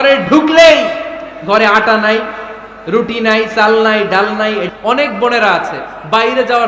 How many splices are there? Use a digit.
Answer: 1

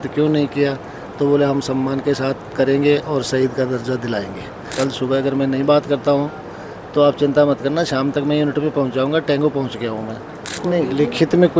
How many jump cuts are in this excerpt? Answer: 2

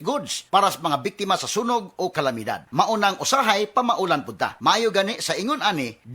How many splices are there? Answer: 0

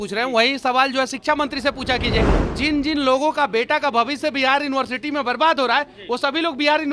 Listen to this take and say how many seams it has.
1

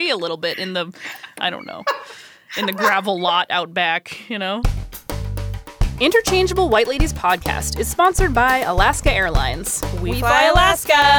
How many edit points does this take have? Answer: 1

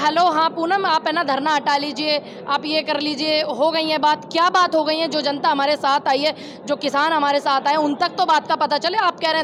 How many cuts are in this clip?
0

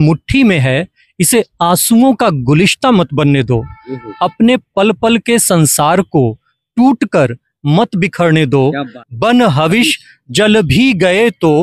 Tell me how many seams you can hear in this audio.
1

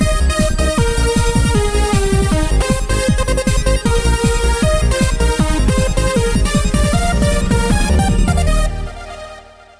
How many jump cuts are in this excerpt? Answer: 1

